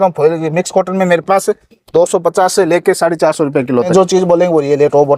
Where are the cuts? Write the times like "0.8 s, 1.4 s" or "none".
3.9 s